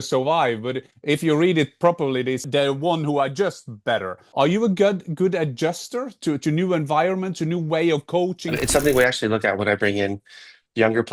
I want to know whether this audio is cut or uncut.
cut